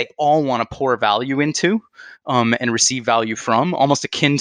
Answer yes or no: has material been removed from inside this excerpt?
no